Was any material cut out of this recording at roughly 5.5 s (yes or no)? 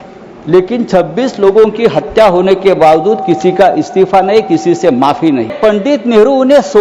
yes